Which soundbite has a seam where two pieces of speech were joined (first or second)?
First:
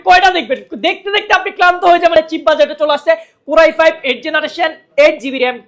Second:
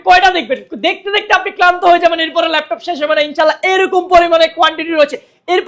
first